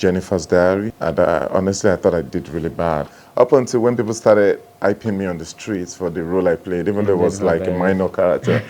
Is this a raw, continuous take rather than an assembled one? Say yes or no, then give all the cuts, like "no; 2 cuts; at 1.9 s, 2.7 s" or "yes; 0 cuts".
no; 2 cuts; at 1.0 s, 3.2 s